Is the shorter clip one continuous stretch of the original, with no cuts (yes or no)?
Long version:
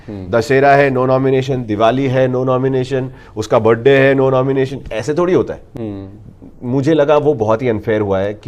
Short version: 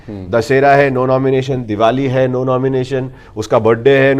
yes